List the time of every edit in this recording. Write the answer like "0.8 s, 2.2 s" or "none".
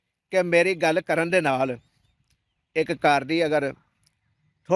none